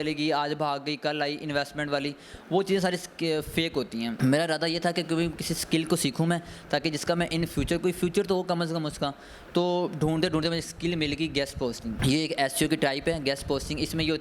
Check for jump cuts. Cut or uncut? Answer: uncut